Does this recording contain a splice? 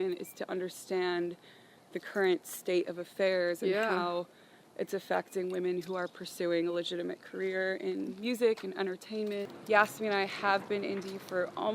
yes; 1 cut; at 9.5 s

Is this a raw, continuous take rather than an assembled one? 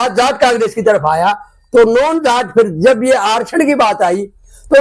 yes; 0 cuts

